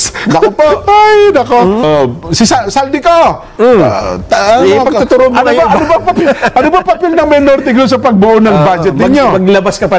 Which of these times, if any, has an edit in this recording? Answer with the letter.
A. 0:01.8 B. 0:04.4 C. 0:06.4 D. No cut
A